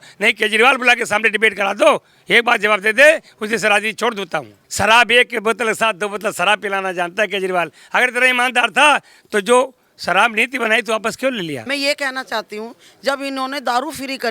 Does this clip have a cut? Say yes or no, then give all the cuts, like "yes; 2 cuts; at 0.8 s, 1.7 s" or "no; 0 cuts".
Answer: yes; 2 cuts; at 4.6 s, 11.6 s